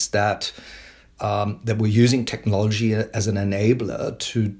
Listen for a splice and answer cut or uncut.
uncut